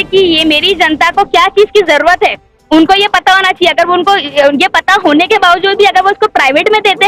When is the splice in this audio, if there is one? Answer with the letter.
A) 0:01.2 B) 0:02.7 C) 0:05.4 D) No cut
D